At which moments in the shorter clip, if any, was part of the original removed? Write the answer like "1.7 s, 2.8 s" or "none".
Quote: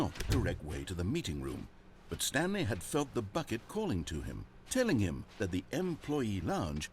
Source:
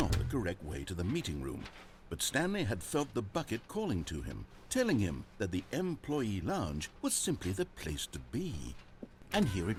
none